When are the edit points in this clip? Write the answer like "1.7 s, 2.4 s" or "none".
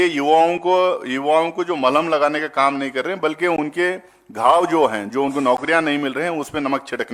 none